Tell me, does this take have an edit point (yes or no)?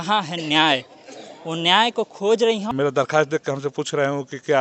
yes